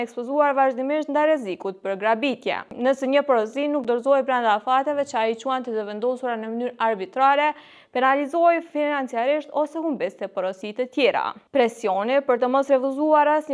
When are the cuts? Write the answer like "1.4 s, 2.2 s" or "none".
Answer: none